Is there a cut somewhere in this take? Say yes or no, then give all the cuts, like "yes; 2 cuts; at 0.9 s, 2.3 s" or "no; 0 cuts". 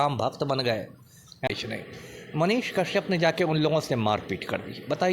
yes; 1 cut; at 1.5 s